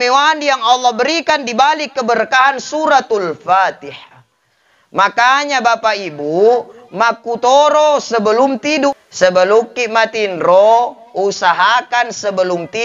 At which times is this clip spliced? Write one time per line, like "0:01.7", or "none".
0:08.9